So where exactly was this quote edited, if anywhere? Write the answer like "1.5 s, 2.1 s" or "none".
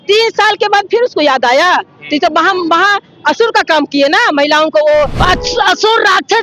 5.2 s